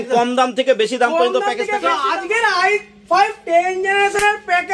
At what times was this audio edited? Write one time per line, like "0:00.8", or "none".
0:01.9